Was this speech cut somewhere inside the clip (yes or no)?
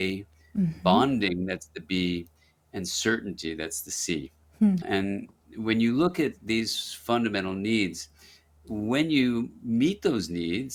no